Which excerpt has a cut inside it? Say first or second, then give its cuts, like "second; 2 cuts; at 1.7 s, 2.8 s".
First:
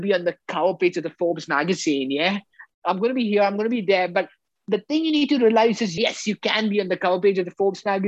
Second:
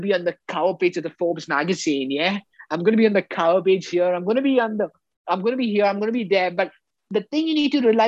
first; 2 cuts; at 2.6 s, 5.9 s